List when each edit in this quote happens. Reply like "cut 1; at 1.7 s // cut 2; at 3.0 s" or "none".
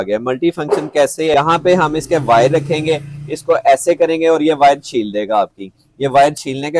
cut 1; at 1.3 s